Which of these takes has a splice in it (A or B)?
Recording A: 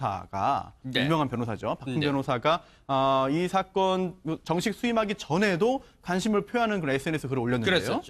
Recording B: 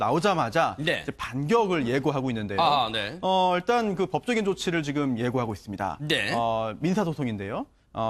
A